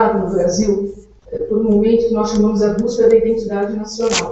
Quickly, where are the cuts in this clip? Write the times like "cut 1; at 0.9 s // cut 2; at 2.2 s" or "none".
cut 1; at 2.7 s